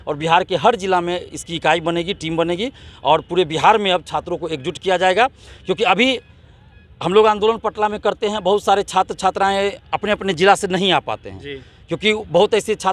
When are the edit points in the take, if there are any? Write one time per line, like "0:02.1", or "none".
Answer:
none